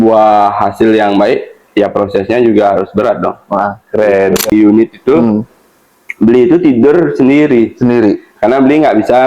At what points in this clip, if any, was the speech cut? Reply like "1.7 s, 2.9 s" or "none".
4.5 s